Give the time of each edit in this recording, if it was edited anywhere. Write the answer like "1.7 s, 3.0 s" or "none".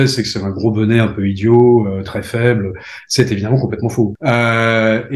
4.2 s